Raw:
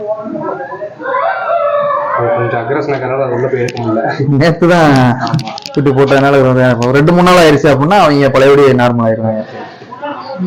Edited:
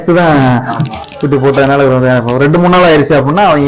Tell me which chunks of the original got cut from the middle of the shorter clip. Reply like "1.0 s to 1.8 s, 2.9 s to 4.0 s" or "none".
none